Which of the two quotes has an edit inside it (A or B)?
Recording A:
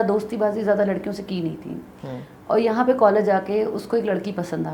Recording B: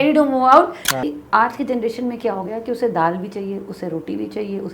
B